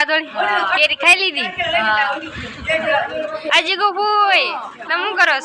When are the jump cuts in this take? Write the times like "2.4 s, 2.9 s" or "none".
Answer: none